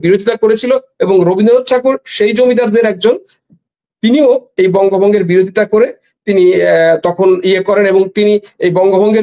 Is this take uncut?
yes; 0 cuts

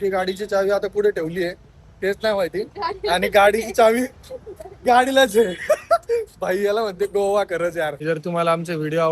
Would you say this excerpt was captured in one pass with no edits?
no; 1 cut; at 8.0 s

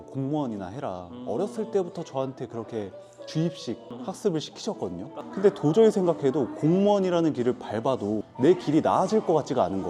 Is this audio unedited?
yes; 0 cuts

